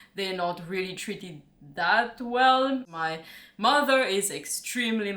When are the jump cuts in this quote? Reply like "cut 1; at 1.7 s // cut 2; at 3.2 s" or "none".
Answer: cut 1; at 2.9 s